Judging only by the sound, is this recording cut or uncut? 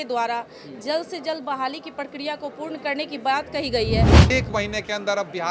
cut